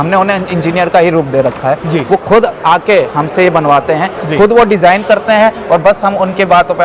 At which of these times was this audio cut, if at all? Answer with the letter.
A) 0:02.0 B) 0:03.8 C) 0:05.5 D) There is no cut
D